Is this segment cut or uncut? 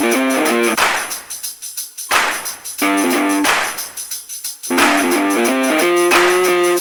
uncut